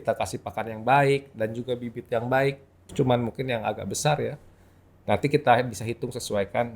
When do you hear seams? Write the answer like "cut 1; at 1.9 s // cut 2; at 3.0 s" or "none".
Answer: cut 1; at 2.8 s